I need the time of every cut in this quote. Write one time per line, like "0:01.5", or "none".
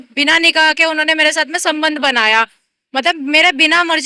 none

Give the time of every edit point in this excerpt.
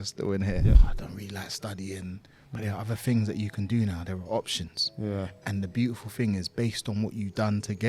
0:00.9

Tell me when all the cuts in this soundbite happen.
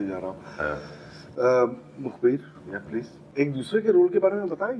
0:03.2

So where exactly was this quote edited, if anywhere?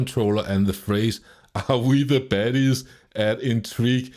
none

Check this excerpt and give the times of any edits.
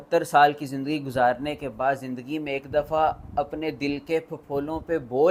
none

